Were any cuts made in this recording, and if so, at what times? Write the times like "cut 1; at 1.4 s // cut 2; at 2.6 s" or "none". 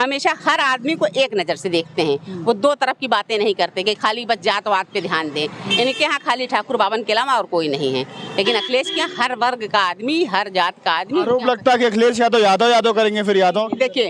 none

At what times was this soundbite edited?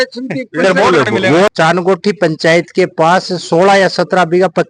cut 1; at 1.5 s

